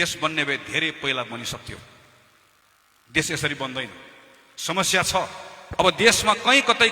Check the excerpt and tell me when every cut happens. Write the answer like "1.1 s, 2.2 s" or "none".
5.8 s

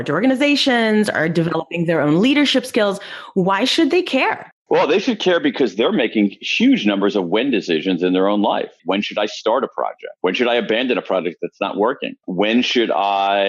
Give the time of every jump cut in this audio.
8.8 s, 12.1 s

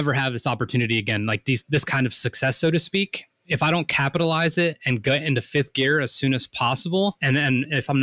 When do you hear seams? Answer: 3.4 s, 7.2 s

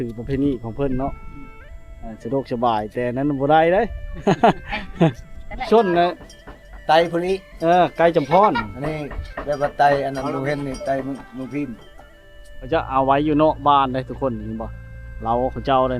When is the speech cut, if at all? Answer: 5.6 s, 12.7 s

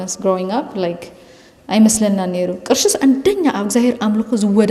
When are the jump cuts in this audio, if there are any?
none

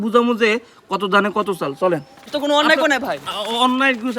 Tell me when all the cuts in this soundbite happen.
2.3 s

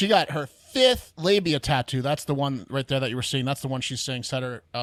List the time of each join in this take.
none

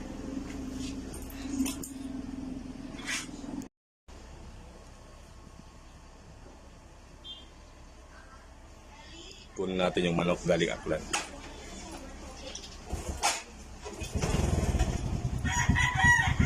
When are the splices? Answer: 3.9 s

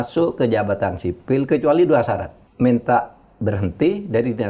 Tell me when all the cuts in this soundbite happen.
2.4 s

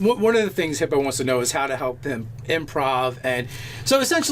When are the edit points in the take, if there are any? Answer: 2.8 s

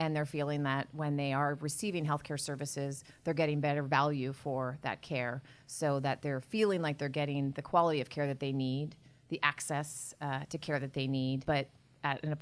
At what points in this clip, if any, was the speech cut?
11.4 s

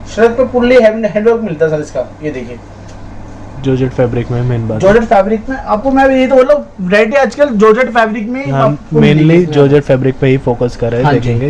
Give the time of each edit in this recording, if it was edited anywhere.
none

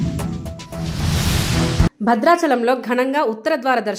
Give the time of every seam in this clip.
none

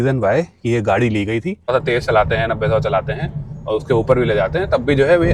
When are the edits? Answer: 1.7 s

